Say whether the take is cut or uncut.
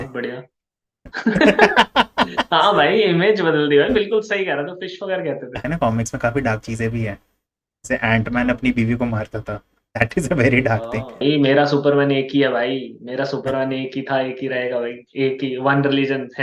cut